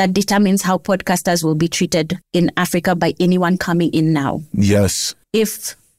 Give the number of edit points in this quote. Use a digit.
0